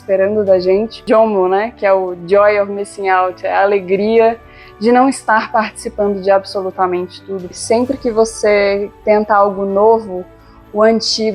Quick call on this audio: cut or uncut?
cut